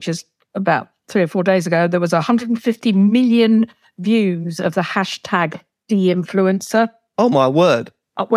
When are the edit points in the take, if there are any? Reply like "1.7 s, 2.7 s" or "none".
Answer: 5.7 s, 7.0 s